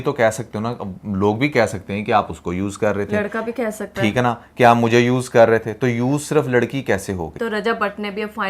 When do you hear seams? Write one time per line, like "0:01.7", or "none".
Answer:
0:07.3